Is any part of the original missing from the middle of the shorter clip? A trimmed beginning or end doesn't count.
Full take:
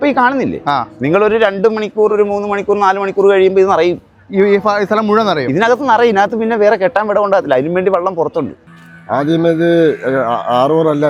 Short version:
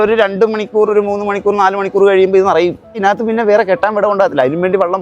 yes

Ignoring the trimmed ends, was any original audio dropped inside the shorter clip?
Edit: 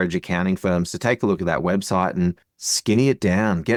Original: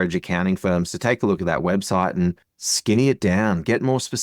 no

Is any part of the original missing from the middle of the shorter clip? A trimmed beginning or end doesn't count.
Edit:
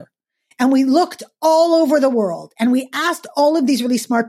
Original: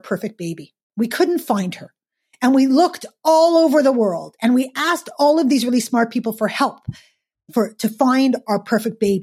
no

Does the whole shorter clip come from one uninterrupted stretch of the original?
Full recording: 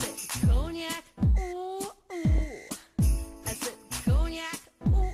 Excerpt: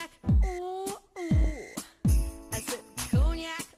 yes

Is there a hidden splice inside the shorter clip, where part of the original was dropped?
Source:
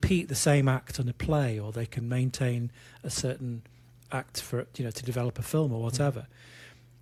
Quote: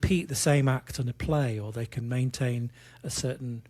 no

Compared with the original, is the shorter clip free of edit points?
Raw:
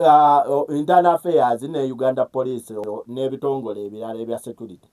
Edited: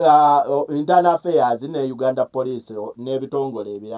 no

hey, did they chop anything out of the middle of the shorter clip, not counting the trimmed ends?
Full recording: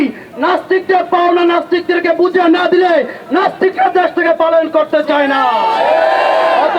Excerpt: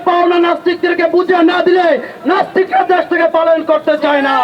no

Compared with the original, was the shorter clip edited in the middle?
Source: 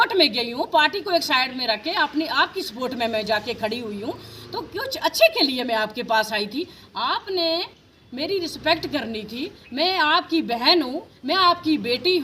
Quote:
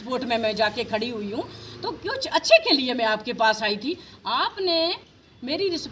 no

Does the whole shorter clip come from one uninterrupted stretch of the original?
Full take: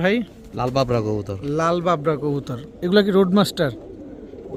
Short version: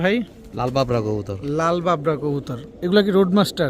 yes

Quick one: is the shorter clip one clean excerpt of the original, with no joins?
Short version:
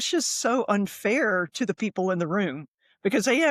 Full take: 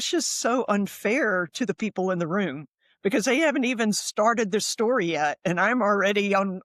yes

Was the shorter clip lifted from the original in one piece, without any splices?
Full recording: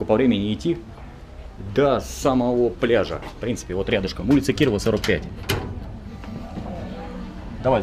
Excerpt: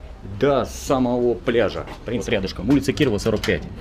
no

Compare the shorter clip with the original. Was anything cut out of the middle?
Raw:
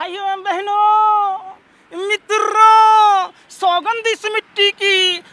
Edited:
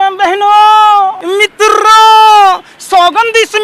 yes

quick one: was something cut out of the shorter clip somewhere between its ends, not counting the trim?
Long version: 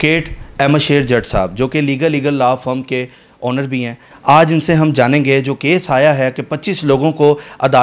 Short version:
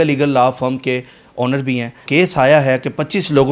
yes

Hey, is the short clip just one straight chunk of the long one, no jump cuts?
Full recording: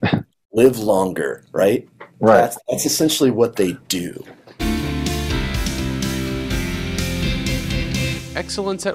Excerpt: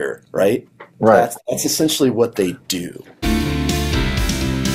no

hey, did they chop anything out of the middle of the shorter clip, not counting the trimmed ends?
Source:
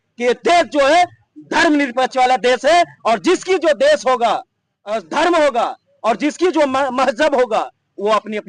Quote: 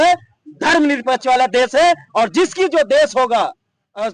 no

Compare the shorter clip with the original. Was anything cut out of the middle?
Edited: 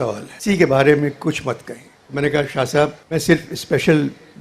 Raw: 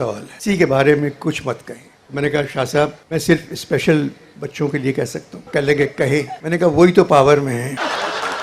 no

